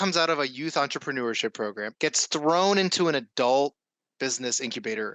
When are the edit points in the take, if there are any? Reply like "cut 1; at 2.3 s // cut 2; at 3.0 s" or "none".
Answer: cut 1; at 1.9 s